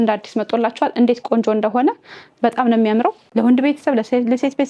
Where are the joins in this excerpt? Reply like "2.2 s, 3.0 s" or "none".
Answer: 3.2 s